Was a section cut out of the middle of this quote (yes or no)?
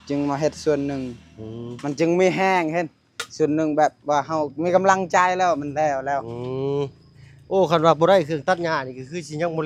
no